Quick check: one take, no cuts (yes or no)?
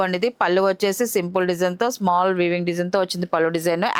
yes